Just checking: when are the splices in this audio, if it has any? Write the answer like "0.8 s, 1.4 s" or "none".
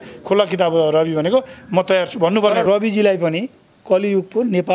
2.6 s